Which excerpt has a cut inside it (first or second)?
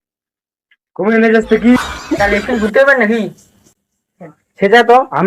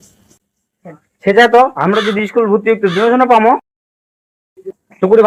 first